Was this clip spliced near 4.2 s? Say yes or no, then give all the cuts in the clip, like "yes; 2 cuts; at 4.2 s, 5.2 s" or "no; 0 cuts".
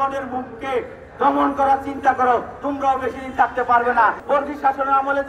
yes; 1 cut; at 4.2 s